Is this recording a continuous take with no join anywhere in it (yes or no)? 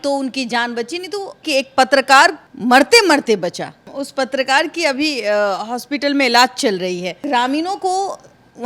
no